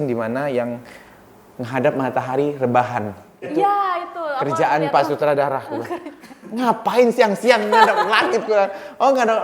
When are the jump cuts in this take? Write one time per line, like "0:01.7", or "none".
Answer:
none